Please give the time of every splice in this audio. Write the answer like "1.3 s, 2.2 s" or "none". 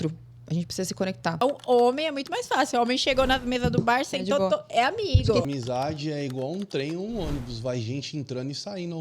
1.4 s, 5.5 s